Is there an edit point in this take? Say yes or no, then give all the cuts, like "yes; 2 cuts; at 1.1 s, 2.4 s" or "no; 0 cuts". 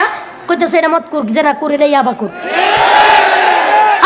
no; 0 cuts